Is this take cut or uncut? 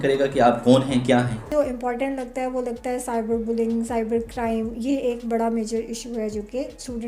cut